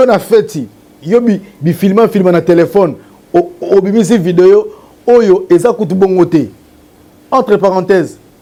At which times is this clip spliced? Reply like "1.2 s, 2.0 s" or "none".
none